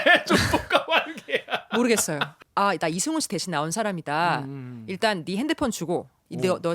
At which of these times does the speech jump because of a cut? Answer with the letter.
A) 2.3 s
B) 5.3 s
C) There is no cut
A